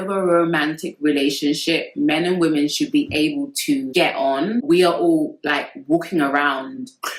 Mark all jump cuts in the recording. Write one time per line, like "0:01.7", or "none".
0:04.6